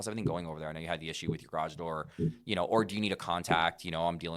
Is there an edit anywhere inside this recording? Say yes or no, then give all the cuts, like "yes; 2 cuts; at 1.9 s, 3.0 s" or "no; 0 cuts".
no; 0 cuts